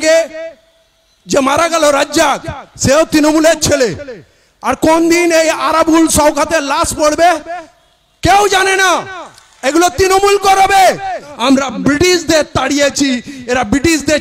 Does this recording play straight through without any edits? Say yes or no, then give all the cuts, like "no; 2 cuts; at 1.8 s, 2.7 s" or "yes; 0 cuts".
no; 1 cut; at 11.3 s